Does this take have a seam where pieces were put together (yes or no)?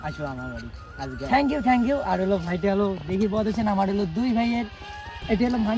no